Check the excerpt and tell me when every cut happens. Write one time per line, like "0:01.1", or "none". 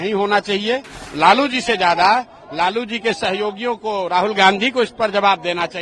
0:01.0